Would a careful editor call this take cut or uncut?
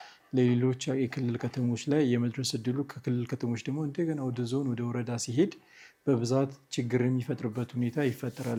uncut